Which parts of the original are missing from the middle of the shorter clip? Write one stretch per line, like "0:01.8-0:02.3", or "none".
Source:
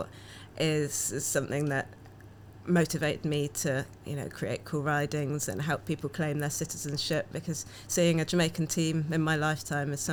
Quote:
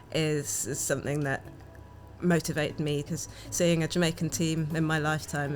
0:03.5-0:07.5